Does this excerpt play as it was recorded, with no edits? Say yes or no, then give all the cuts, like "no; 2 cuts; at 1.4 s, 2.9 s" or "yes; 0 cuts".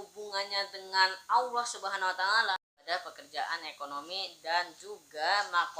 no; 1 cut; at 2.5 s